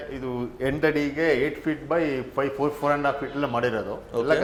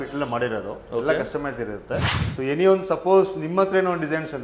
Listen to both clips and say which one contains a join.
second; 1 cut; at 2.1 s

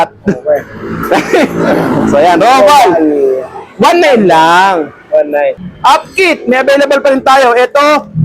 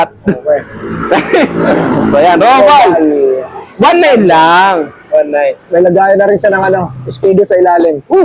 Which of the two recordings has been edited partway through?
first; 1 cut; at 5.6 s

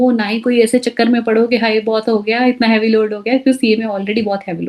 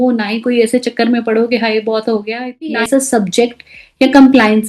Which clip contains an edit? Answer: second; 1 cut; at 2.8 s

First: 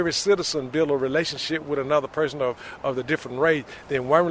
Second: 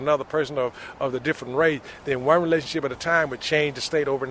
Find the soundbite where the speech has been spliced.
second; 1 cut; at 3.4 s

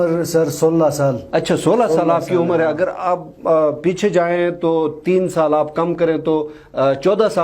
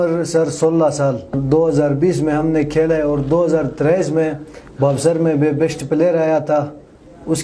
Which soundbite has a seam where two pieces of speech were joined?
second; 1 cut; at 1.3 s

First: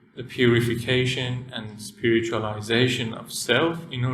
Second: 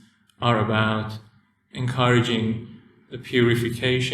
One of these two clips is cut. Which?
second; 1 cut; at 1.7 s

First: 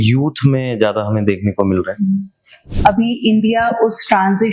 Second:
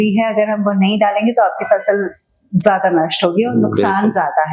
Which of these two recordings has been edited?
first; 1 cut; at 2.7 s

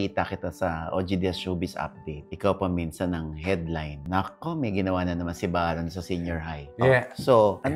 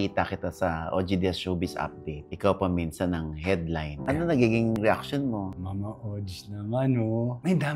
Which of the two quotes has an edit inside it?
second; 2 cuts; at 4.0 s, 5.5 s

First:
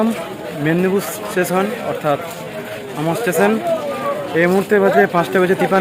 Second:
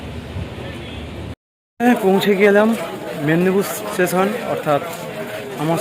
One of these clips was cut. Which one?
second; 1 cut; at 1.4 s

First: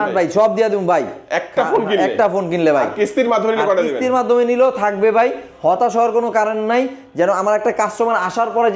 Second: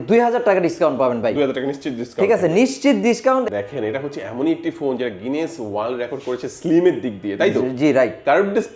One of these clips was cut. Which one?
second; 1 cut; at 3.5 s

